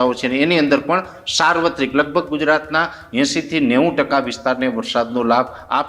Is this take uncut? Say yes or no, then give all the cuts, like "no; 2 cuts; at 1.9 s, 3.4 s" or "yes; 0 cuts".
yes; 0 cuts